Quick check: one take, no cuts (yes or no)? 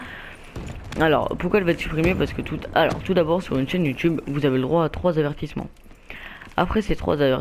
yes